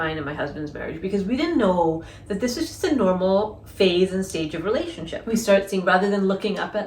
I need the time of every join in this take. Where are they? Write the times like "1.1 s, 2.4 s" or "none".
5.1 s

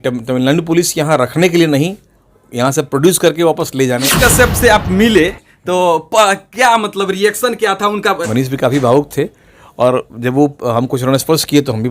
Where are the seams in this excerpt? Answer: 4.1 s, 8.2 s

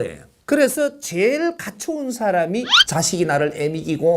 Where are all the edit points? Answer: 2.8 s

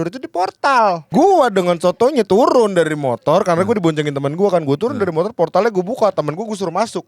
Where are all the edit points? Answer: 1.1 s

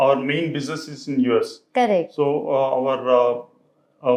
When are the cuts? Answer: none

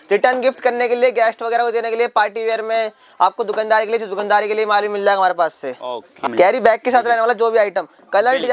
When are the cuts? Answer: 6.2 s

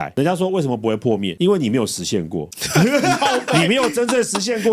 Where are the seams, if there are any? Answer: none

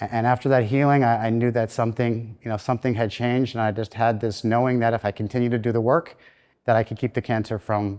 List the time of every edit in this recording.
none

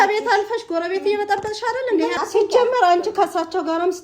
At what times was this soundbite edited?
2.1 s

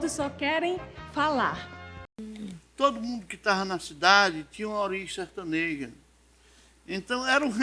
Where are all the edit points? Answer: 2.4 s

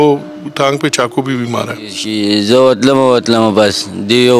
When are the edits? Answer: 2.0 s

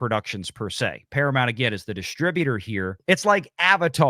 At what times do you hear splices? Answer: 3.0 s

